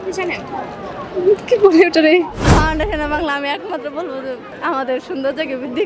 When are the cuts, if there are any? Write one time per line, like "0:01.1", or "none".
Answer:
0:02.4
0:04.5